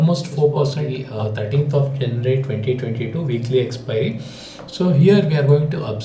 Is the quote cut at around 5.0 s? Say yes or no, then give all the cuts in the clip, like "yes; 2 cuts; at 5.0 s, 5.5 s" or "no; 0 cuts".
no; 1 cut; at 1.0 s